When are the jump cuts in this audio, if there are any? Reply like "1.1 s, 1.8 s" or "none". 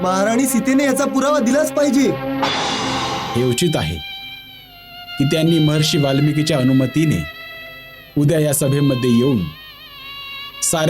3.2 s